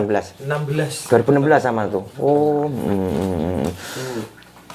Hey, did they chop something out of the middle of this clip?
no; 0 cuts

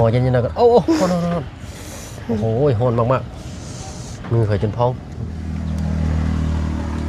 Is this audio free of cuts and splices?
no; 1 cut; at 5.4 s

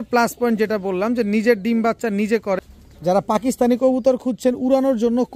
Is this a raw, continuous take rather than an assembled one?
no; 1 cut; at 2.6 s

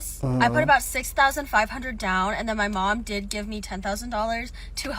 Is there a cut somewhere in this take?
no; 0 cuts

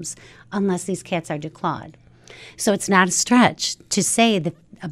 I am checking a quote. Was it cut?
no; 0 cuts

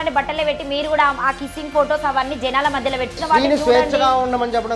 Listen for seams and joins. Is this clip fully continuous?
no; 1 cut; at 3.2 s

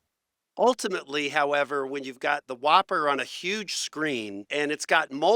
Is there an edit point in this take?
yes; 1 cut; at 4.4 s

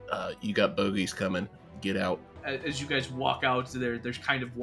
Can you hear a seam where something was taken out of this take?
yes; 1 cut; at 2.3 s

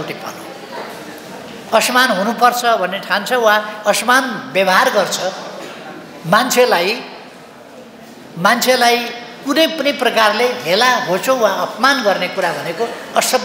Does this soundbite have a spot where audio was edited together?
no; 0 cuts

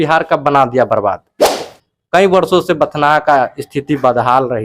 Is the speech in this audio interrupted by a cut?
yes; 1 cut; at 1.8 s

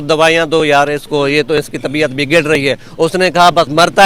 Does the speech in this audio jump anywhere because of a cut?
no; 0 cuts

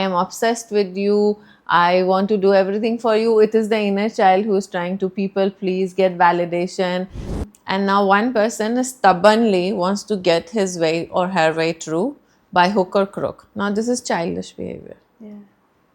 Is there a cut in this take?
yes; 1 cut; at 7.2 s

